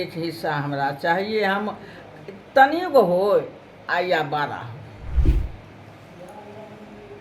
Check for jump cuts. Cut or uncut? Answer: cut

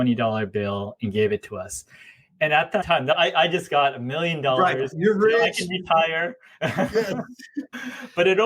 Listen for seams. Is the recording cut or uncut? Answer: cut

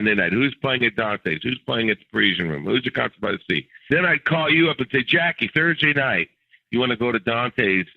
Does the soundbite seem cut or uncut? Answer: cut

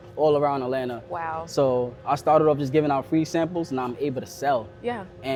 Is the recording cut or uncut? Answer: uncut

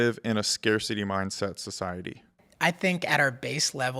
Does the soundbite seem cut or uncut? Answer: cut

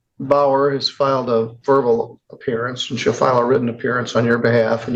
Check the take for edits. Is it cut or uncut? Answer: uncut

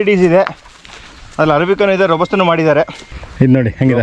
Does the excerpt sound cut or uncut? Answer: cut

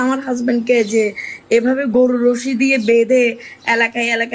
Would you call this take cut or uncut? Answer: uncut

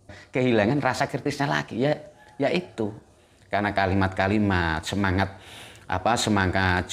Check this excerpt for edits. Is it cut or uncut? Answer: uncut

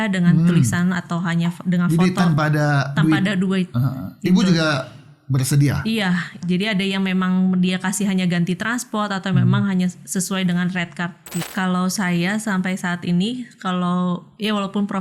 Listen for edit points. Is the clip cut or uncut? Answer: cut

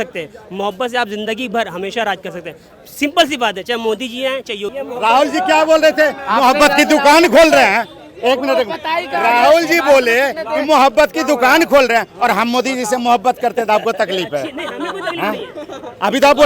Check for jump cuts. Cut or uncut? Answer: cut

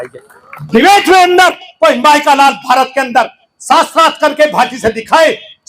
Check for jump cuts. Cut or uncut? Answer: uncut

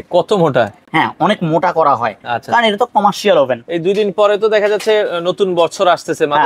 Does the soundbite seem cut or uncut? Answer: uncut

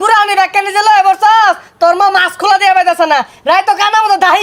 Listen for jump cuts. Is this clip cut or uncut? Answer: uncut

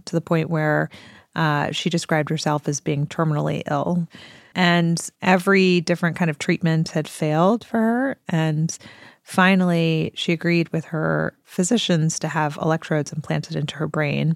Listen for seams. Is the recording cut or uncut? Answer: cut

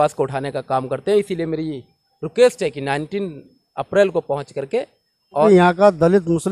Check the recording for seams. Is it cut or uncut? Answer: cut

